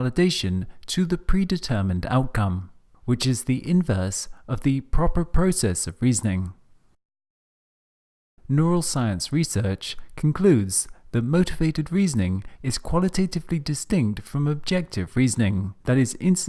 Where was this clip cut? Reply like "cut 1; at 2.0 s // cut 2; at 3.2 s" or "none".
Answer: cut 1; at 8.9 s